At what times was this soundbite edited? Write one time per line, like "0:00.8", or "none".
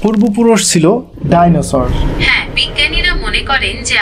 0:02.0